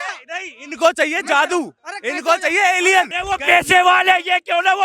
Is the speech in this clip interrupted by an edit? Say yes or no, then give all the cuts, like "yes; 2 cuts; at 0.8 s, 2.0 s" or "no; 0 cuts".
yes; 1 cut; at 3.2 s